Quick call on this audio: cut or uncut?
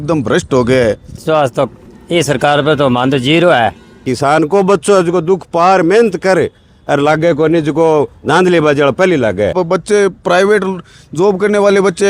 cut